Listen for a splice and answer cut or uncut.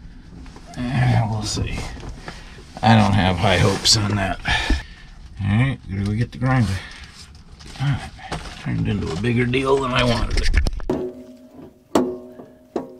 cut